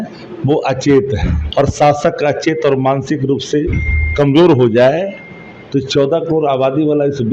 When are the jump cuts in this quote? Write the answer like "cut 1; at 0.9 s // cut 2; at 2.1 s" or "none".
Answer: cut 1; at 1.4 s